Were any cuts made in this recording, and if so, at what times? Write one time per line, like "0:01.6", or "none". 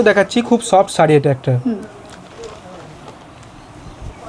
none